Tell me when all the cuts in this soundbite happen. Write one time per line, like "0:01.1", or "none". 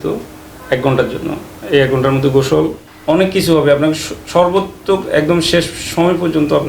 0:02.9